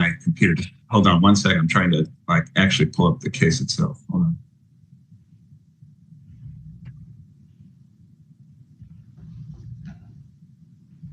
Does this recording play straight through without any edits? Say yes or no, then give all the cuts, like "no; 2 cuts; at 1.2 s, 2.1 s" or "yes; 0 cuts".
yes; 0 cuts